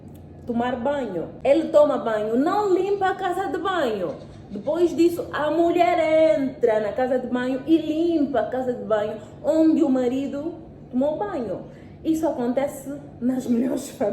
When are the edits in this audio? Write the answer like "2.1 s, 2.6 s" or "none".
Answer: 1.3 s